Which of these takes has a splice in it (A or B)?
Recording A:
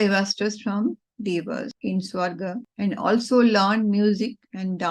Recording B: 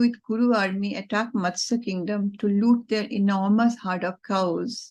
A